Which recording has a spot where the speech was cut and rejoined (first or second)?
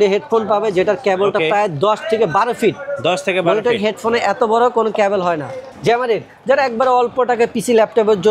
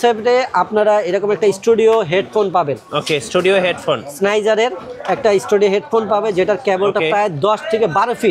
first